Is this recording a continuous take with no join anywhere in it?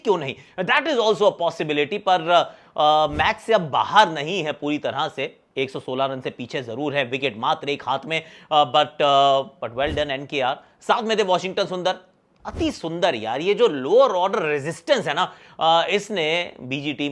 yes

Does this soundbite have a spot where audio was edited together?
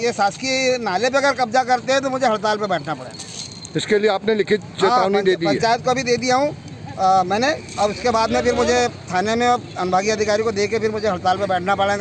no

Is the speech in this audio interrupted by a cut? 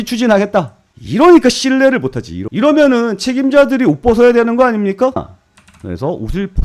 yes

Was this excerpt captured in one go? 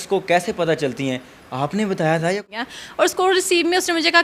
no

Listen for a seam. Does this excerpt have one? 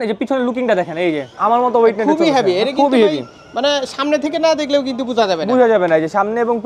yes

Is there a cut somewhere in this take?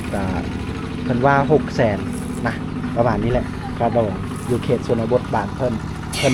no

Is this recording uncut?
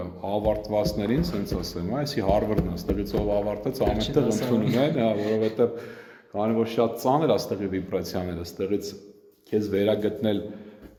yes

